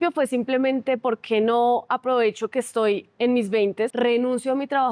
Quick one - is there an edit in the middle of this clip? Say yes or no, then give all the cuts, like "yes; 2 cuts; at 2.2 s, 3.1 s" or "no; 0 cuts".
yes; 1 cut; at 3.9 s